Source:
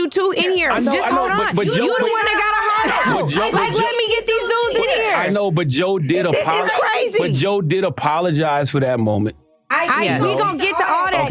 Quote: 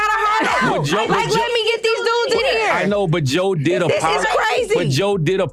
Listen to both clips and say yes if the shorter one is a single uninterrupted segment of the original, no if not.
yes